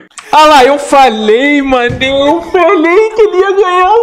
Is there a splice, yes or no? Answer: no